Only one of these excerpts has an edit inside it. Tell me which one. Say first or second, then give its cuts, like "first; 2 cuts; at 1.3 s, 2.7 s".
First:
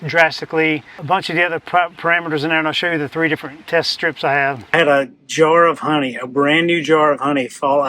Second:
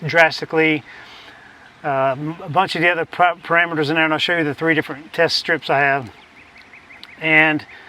first; 2 cuts; at 0.9 s, 4.7 s